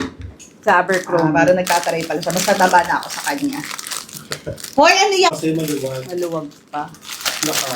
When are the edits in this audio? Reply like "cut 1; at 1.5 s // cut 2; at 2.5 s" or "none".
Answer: cut 1; at 5.4 s